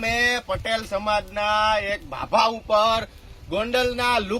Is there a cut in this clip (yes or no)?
no